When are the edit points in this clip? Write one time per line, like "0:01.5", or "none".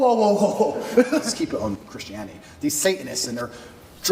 0:01.3